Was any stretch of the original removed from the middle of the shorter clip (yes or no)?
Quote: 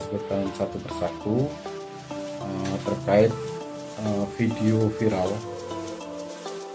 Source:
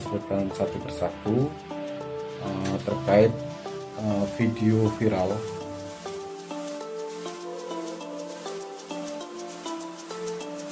yes